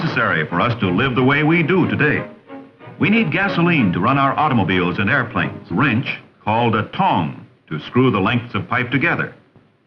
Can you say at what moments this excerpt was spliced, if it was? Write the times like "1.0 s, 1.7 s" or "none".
none